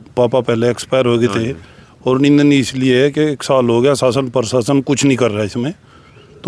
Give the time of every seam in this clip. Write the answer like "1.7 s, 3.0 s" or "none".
none